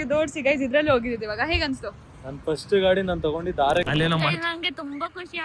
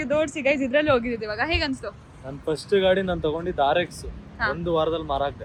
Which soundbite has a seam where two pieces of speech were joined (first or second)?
first